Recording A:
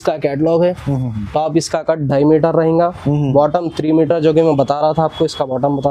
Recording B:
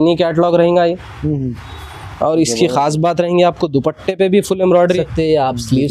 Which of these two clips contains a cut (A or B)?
B